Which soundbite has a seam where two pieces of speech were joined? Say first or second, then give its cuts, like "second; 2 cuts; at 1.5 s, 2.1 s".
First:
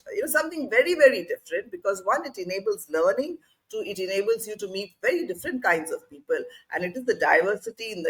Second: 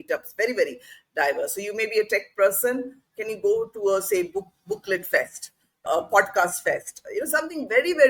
second; 1 cut; at 5.9 s